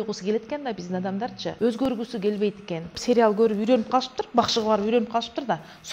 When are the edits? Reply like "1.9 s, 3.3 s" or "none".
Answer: 1.5 s, 3.0 s